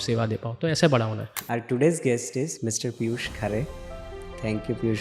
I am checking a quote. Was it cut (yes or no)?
yes